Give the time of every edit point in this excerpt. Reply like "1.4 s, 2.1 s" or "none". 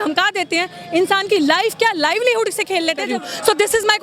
3.1 s